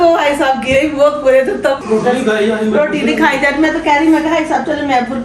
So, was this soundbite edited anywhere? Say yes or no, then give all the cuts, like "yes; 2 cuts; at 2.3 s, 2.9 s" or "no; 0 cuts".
yes; 1 cut; at 1.8 s